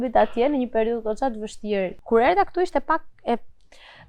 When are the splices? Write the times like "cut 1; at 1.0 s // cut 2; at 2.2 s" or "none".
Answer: cut 1; at 2.0 s